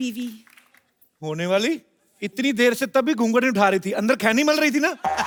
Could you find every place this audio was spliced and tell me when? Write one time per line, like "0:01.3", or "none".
none